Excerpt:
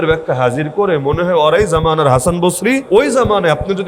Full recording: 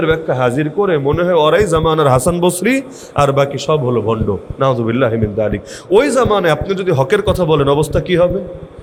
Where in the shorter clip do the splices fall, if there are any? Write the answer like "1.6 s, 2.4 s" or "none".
2.8 s

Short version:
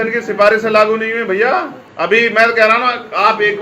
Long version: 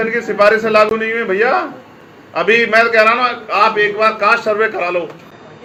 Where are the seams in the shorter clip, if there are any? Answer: 1.8 s

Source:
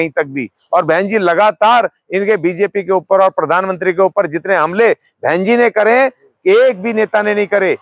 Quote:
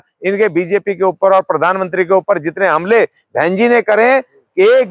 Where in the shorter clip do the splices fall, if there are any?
none

